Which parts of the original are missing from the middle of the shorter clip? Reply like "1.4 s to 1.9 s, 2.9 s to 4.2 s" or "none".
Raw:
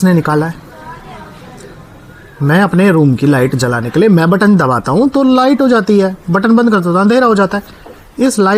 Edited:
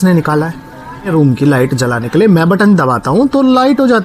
1.1 s to 2.9 s